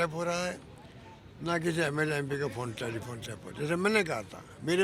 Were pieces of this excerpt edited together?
no; 0 cuts

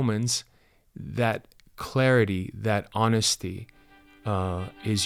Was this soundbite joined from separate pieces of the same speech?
no; 0 cuts

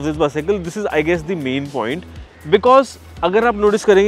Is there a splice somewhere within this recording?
no; 0 cuts

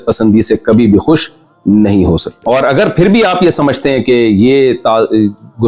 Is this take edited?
yes; 1 cut; at 2.4 s

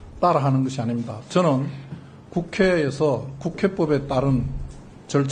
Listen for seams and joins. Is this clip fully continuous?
yes; 0 cuts

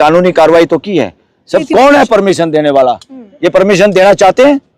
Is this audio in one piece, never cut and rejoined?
no; 1 cut; at 1.6 s

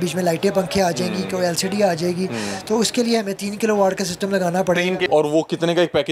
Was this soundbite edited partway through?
yes; 1 cut; at 5.1 s

